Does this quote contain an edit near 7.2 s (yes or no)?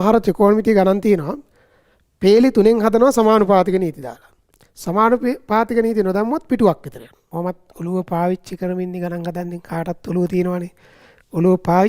yes